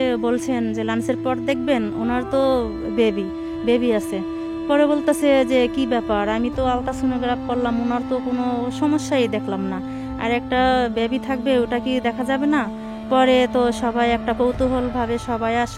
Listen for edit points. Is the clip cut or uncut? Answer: uncut